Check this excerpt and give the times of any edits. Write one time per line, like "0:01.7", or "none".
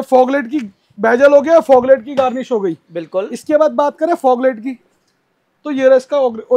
none